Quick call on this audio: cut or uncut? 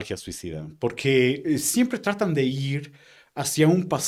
uncut